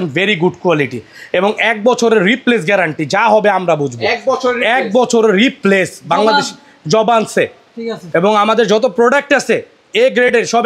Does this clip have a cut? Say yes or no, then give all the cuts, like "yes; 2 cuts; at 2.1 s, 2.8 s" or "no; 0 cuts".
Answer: no; 0 cuts